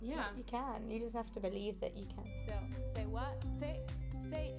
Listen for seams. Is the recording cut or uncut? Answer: cut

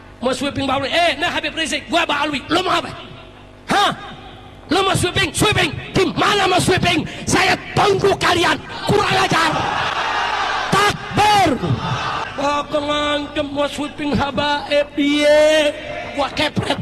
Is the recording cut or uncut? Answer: uncut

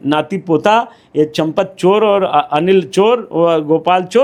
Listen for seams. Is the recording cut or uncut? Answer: uncut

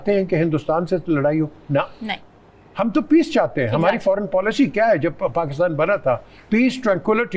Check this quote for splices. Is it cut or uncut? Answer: uncut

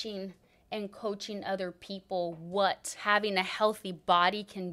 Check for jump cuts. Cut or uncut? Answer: cut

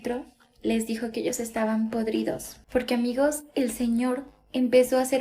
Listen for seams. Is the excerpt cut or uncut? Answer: cut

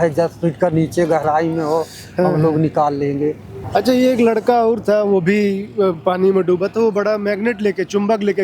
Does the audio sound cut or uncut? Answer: cut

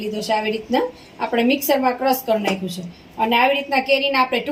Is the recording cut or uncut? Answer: uncut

